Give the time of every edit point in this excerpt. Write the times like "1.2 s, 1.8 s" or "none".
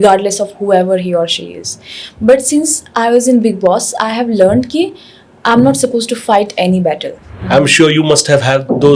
7.3 s